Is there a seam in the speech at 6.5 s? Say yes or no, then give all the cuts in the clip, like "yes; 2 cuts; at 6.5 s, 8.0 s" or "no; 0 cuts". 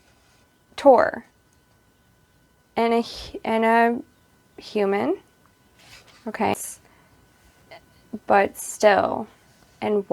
yes; 1 cut; at 6.5 s